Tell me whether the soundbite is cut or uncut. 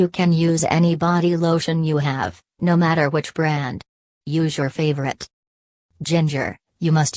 uncut